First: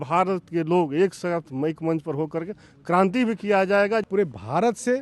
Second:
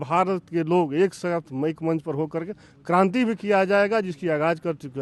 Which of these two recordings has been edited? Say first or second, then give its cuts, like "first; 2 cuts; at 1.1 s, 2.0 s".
first; 1 cut; at 4.1 s